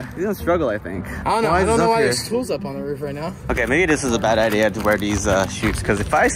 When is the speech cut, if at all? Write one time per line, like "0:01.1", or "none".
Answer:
0:01.2
0:03.4